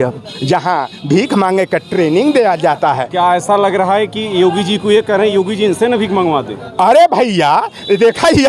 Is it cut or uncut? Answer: uncut